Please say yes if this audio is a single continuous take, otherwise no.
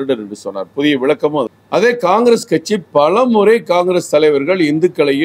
yes